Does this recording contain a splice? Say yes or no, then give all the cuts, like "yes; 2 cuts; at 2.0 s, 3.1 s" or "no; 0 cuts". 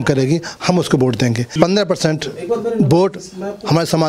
yes; 1 cut; at 1.5 s